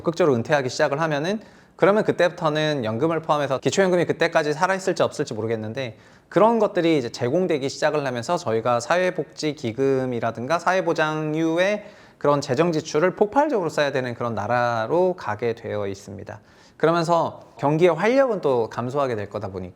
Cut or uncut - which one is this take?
cut